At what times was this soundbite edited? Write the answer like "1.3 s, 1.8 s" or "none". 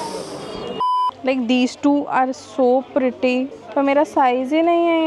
1.1 s, 3.6 s